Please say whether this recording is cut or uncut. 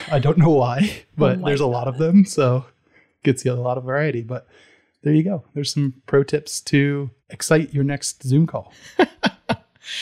uncut